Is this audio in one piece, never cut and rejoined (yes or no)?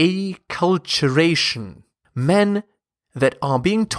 no